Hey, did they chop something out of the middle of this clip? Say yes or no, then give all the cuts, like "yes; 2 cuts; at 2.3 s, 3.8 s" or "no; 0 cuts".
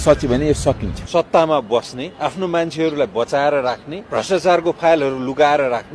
yes; 3 cuts; at 0.9 s, 2.0 s, 3.9 s